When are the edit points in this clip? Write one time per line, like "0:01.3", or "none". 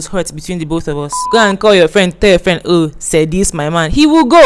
0:01.2